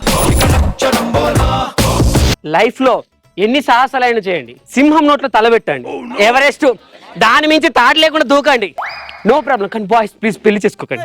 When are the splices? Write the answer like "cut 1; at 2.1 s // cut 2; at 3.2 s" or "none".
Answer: cut 1; at 2.3 s

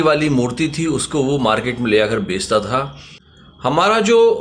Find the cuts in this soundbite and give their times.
cut 1; at 3.2 s

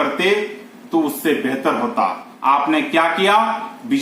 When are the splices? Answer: cut 1; at 2.3 s

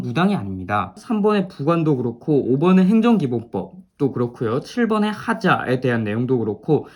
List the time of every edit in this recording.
cut 1; at 1.0 s

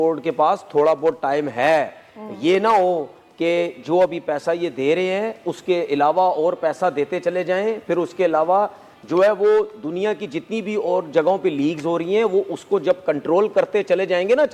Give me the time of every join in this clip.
none

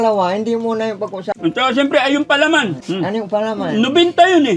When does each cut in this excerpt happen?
cut 1; at 1.2 s // cut 2; at 2.8 s

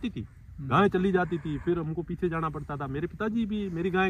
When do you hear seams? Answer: none

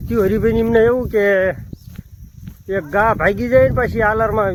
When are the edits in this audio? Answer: none

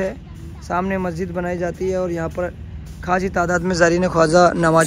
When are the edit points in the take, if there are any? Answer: none

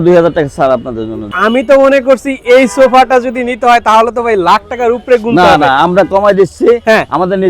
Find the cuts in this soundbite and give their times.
cut 1; at 1.3 s

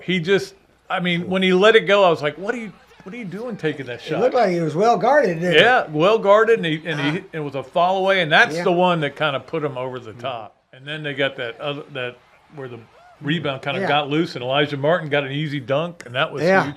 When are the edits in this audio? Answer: cut 1; at 11.0 s

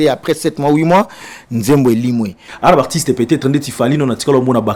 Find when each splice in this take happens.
cut 1; at 2.4 s

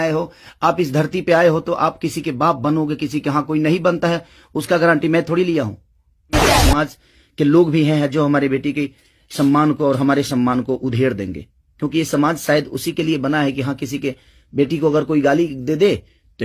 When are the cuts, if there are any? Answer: cut 1; at 6.5 s

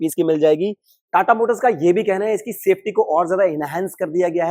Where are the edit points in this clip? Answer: cut 1; at 0.9 s

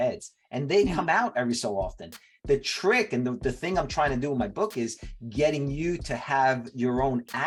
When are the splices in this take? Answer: none

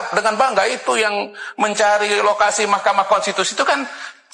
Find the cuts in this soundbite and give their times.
none

